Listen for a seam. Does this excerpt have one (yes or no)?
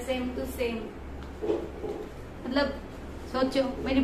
no